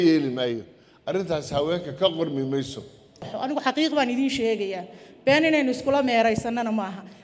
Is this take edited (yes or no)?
yes